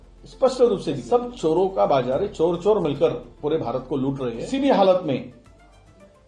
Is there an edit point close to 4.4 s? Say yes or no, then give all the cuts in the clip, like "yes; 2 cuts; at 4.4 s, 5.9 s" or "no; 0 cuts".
yes; 2 cuts; at 1.0 s, 4.4 s